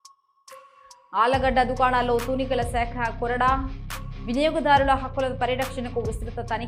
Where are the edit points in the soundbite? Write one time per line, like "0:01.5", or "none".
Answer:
none